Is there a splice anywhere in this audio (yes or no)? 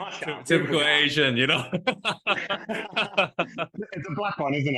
yes